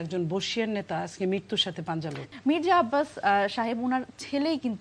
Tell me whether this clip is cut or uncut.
cut